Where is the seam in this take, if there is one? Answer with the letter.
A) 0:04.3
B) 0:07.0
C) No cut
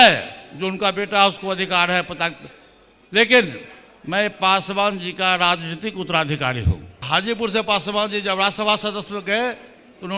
B